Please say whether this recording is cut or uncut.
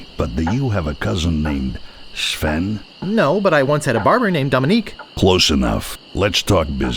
cut